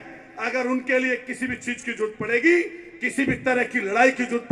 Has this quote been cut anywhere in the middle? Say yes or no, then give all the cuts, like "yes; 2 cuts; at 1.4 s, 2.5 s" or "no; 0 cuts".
no; 0 cuts